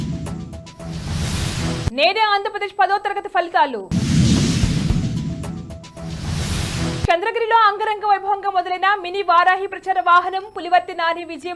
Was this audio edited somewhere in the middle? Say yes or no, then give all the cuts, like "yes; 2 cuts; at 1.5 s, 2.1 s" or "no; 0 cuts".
yes; 1 cut; at 1.8 s